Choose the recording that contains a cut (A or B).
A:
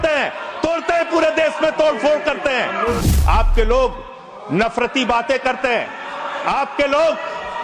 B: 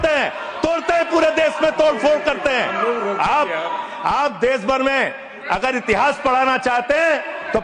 A